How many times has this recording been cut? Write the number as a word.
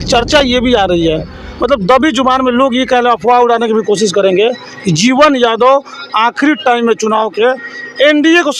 zero